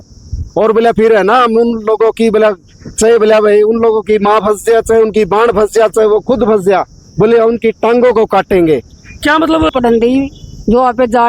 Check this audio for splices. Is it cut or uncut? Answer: cut